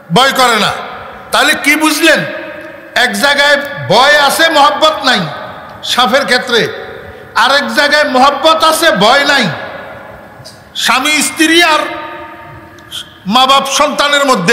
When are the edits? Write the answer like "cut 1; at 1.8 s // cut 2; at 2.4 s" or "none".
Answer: none